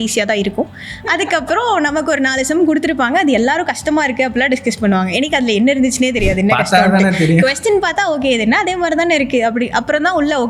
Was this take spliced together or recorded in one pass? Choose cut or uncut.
uncut